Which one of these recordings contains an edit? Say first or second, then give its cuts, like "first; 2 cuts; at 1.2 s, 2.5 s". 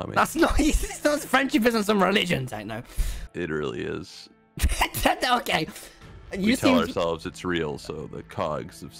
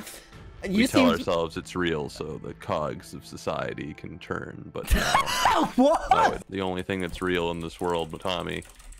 second; 1 cut; at 6.4 s